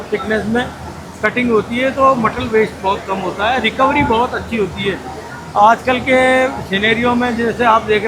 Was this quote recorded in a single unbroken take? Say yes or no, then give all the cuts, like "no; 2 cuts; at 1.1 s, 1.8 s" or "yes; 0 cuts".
yes; 0 cuts